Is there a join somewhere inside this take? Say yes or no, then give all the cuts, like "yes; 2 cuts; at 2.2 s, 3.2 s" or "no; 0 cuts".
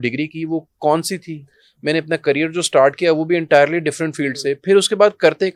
no; 0 cuts